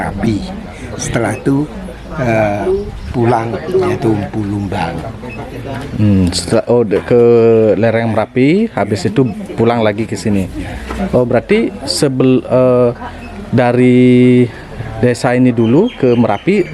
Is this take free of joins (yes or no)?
yes